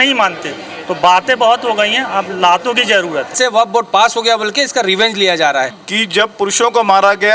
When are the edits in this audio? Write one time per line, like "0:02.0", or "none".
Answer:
0:03.3
0:05.8